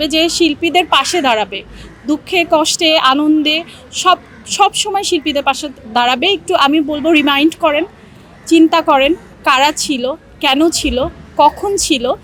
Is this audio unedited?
yes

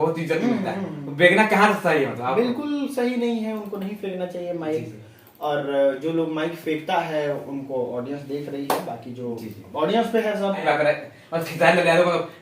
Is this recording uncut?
no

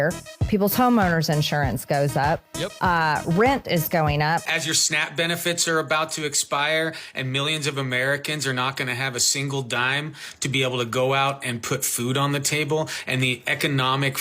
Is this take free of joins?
no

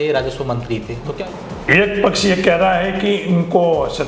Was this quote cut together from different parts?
yes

